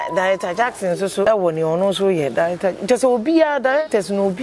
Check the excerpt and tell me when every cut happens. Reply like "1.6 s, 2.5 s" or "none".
1.2 s